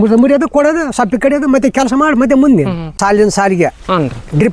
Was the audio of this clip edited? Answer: yes; 1 cut; at 3.0 s

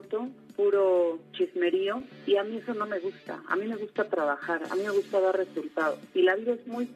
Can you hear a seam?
no; 0 cuts

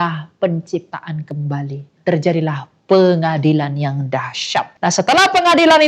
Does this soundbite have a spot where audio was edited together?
yes; 2 cuts; at 1.9 s, 4.7 s

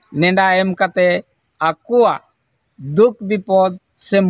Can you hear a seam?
no; 0 cuts

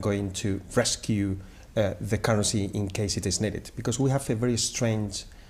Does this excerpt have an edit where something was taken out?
no; 0 cuts

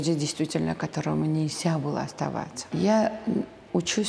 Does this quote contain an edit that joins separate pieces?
yes; 1 cut; at 2.6 s

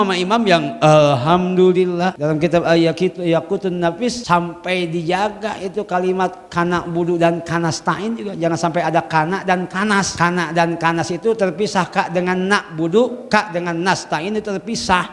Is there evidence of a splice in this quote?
yes; 3 cuts; at 2.2 s, 4.2 s, 10.1 s

